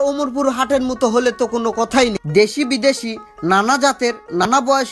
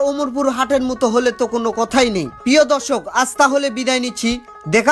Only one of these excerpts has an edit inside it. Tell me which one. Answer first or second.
first